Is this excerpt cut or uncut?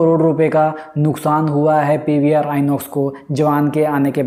uncut